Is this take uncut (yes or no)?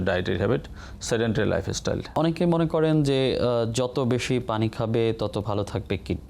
no